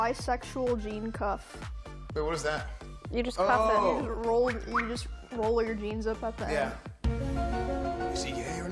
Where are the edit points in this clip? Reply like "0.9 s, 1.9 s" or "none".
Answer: none